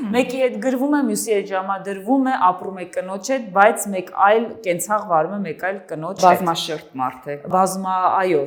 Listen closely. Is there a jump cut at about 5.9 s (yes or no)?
no